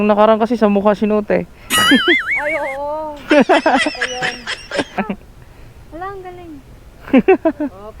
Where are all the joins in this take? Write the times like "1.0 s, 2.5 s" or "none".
5.0 s